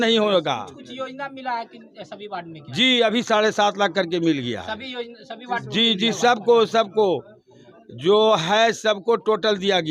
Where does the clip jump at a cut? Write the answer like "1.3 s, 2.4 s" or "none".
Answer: none